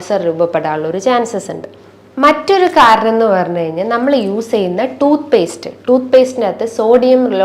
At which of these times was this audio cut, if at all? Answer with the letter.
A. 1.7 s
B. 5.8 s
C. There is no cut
C